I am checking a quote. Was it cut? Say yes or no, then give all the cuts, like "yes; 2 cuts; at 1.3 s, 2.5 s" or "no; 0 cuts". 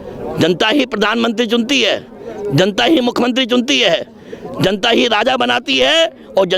no; 0 cuts